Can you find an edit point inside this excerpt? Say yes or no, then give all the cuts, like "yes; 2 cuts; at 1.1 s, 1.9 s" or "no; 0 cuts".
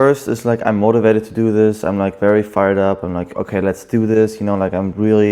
no; 0 cuts